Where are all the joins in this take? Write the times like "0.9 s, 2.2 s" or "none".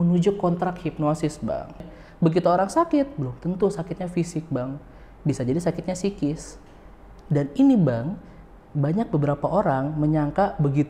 1.9 s